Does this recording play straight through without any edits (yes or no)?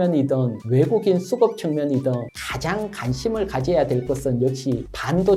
yes